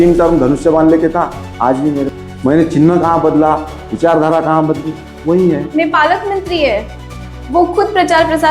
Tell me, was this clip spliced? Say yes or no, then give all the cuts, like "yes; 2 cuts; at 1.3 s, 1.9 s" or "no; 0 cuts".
yes; 2 cuts; at 2.1 s, 5.7 s